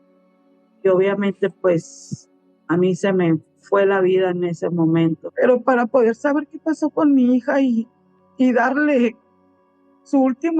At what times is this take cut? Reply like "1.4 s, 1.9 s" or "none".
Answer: 5.2 s